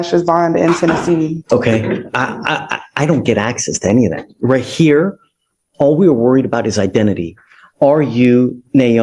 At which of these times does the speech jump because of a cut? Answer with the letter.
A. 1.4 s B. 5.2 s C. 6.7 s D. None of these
A